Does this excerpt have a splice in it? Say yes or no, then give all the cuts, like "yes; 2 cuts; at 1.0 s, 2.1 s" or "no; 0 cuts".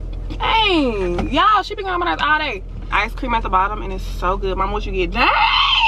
yes; 1 cut; at 2.9 s